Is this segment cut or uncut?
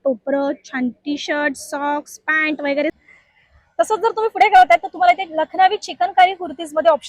cut